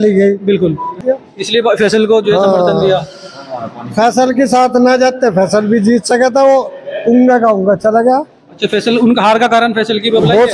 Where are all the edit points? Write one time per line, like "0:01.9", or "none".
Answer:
0:01.0